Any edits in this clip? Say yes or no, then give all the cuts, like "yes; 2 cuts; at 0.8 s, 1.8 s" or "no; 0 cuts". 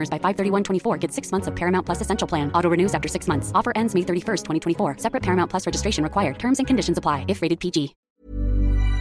yes; 1 cut; at 8.0 s